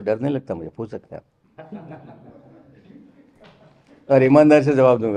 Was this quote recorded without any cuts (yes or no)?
yes